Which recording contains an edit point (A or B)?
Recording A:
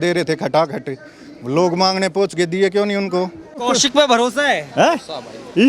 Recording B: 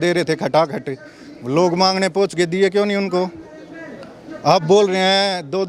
A